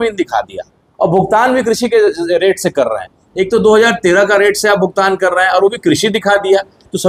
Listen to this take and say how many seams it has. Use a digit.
0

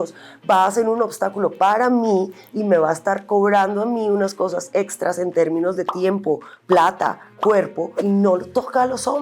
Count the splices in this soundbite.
1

